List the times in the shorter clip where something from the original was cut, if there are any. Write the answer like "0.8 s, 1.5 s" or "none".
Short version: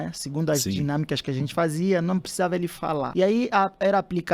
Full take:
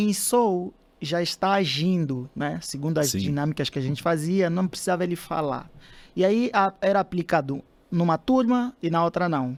3.1 s